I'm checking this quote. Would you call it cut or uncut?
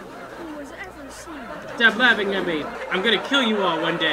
cut